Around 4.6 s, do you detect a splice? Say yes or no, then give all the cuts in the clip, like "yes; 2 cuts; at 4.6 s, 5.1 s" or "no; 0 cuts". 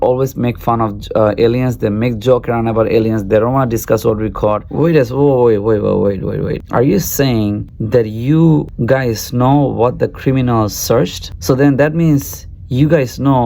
yes; 1 cut; at 4.6 s